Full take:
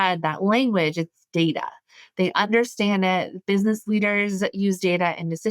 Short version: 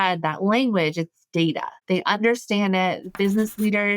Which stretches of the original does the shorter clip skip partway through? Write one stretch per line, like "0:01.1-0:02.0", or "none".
0:01.7-0:02.0